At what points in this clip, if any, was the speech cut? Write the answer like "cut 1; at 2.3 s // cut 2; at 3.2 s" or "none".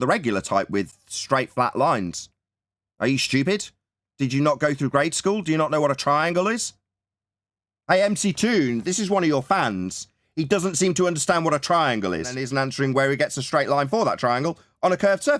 cut 1; at 12.4 s